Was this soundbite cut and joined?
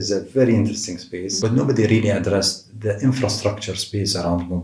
yes; 1 cut; at 1.3 s

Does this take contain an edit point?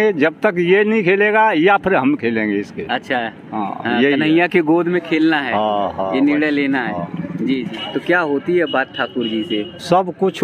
yes; 1 cut; at 7.7 s

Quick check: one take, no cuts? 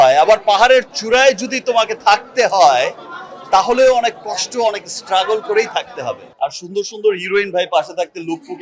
no; 1 cut; at 6.2 s

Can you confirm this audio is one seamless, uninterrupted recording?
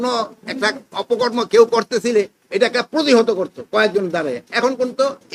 yes; 0 cuts

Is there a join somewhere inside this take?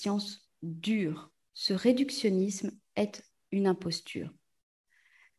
no; 0 cuts

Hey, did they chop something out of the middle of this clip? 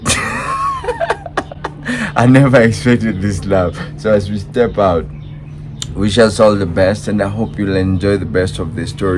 no; 0 cuts

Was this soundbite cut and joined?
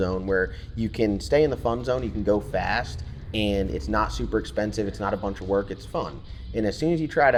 no; 0 cuts

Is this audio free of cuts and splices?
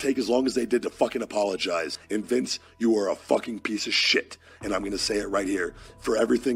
yes; 0 cuts

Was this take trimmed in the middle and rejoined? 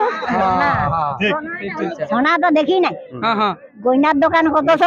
yes; 1 cut; at 2.0 s

